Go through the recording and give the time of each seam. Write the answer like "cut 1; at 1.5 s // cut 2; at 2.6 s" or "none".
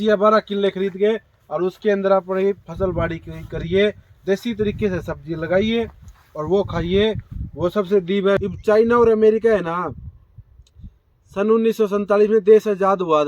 cut 1; at 8.4 s